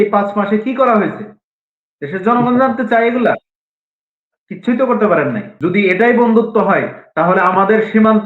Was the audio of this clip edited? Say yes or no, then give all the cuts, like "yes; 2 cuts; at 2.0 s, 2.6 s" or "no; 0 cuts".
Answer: yes; 1 cut; at 5.5 s